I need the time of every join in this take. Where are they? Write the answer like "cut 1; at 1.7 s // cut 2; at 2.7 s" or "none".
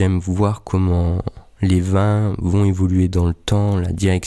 none